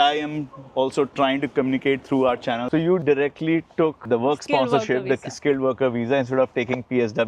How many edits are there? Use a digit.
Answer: 1